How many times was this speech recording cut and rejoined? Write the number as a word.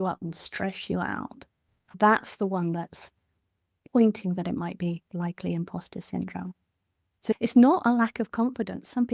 two